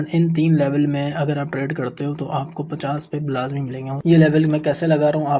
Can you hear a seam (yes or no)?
yes